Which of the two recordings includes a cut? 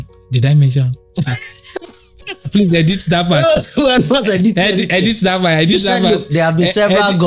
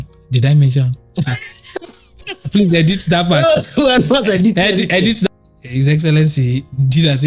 second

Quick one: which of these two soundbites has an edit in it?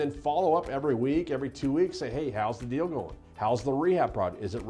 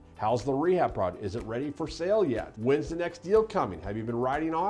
second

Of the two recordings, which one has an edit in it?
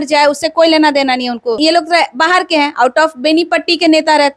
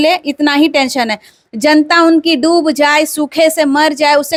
first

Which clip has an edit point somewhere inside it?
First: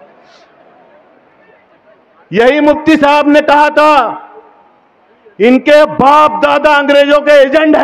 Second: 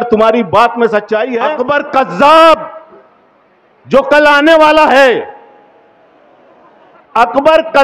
second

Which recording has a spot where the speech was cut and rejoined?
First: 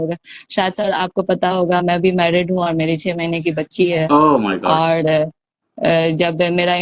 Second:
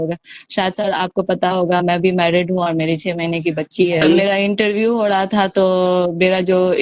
second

